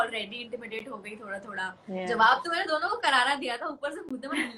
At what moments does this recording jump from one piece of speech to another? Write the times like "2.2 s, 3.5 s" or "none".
none